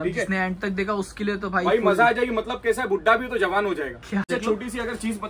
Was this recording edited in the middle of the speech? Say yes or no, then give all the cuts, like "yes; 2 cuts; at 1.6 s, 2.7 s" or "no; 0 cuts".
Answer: yes; 1 cut; at 4.2 s